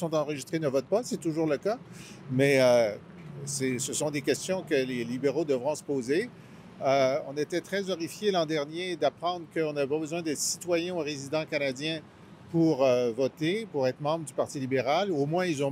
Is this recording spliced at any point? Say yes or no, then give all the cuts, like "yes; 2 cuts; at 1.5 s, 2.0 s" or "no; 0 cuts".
no; 0 cuts